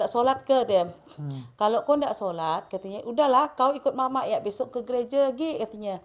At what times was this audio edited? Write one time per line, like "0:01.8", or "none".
none

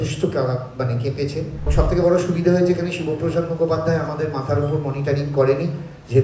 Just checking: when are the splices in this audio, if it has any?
0:01.7

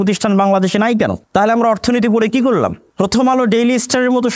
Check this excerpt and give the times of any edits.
0:01.2
0:02.8

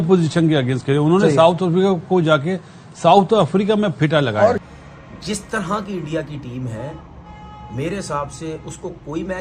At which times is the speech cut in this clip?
0:04.6

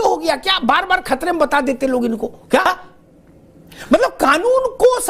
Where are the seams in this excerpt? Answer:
0:02.6

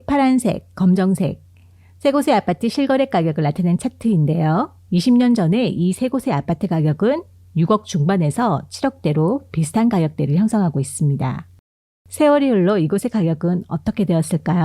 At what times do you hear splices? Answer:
0:12.0

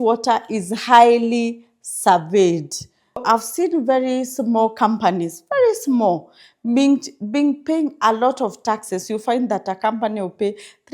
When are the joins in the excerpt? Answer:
0:03.2

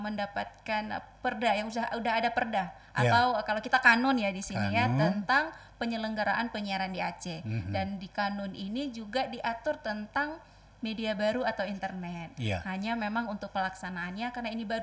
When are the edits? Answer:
none

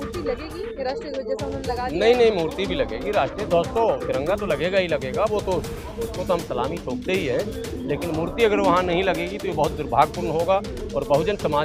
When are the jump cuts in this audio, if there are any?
none

